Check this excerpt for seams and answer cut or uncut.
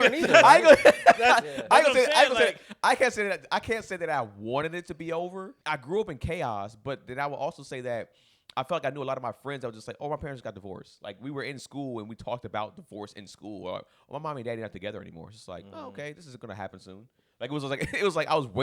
cut